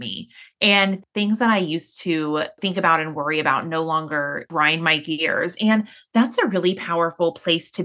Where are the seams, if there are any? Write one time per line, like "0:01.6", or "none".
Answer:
0:01.0
0:02.6
0:04.5